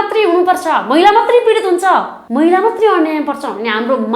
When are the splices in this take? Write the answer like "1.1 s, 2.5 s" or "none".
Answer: 2.2 s